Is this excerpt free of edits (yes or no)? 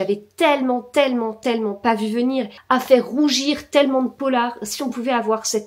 no